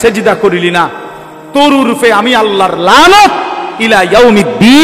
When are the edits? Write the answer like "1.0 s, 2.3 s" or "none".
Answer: none